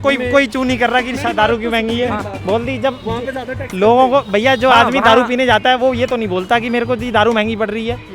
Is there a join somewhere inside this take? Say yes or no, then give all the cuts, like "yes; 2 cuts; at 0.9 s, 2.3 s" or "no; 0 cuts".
yes; 1 cut; at 2.3 s